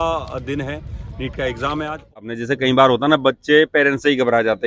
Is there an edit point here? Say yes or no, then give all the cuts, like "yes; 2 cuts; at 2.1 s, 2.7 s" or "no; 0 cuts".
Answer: yes; 1 cut; at 2.3 s